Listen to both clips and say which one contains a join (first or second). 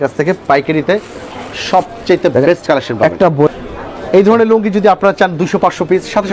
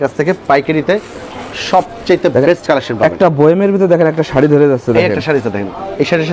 first